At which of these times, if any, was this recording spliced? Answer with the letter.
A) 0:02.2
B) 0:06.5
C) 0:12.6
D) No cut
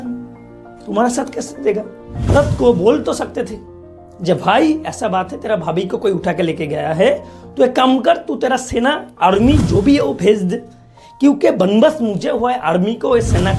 A